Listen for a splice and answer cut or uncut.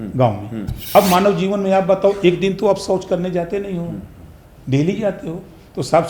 cut